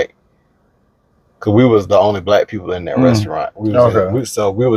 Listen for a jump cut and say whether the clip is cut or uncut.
uncut